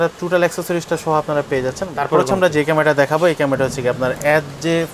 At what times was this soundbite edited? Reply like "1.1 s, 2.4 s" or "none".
1.9 s